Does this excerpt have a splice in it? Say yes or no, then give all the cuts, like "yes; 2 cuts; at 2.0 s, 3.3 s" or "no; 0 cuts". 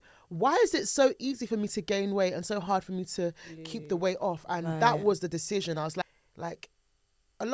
yes; 1 cut; at 6.0 s